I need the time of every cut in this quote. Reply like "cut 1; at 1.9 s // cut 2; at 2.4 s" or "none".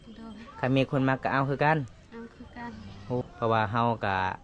cut 1; at 3.2 s